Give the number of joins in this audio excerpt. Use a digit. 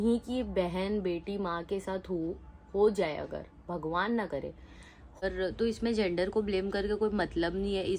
1